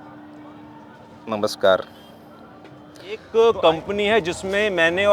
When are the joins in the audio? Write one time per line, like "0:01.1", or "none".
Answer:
0:03.3